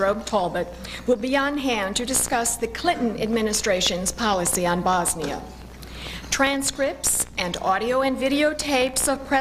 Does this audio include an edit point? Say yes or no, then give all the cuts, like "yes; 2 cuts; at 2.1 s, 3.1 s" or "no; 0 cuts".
no; 0 cuts